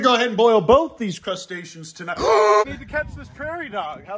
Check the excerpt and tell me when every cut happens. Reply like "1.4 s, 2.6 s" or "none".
2.7 s